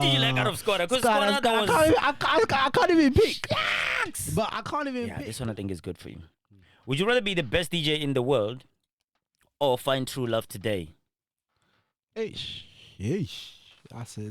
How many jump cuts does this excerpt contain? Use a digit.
1